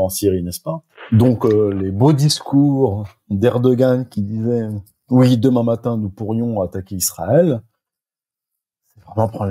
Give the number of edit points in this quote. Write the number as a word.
one